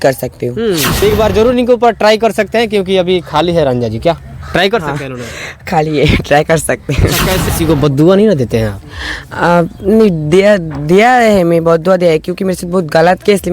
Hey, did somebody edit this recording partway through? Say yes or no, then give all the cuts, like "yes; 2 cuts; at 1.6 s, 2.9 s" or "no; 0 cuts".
yes; 2 cuts; at 0.9 s, 7.5 s